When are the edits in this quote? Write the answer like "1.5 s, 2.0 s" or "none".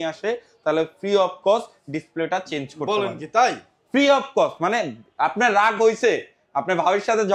none